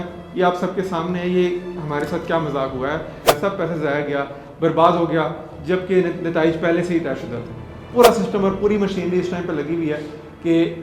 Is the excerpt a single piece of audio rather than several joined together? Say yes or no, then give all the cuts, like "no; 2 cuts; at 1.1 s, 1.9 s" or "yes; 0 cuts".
no; 2 cuts; at 3.1 s, 7.9 s